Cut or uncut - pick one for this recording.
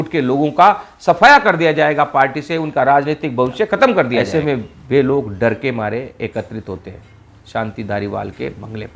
cut